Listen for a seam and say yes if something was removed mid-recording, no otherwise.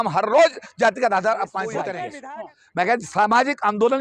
yes